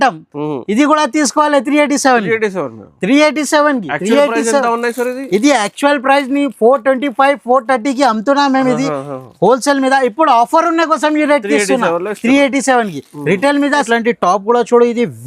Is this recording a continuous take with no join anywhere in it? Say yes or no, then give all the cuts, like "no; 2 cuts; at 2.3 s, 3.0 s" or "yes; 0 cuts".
no; 1 cut; at 14.0 s